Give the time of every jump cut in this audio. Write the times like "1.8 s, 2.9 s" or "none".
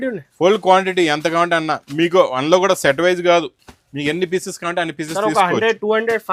none